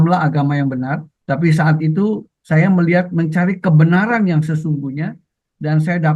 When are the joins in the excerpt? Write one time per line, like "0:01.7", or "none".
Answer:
none